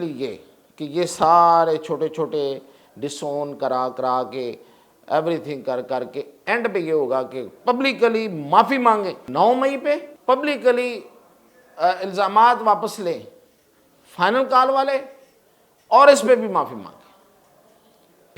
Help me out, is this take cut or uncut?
cut